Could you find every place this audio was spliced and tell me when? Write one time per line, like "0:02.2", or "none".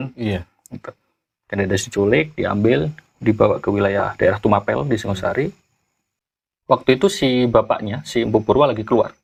none

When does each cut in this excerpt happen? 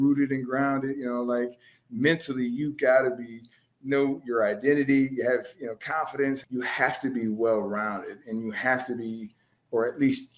0:06.4

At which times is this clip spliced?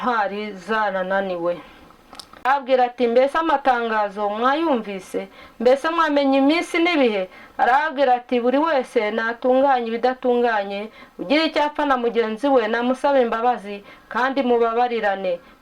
0:02.4

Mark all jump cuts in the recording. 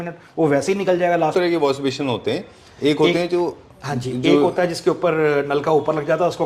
0:01.3

